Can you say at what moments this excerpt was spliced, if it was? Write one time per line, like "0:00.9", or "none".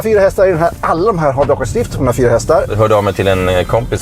0:02.7